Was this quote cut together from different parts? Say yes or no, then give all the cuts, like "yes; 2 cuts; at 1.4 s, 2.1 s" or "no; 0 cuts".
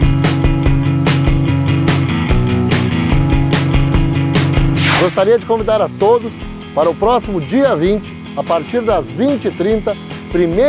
no; 0 cuts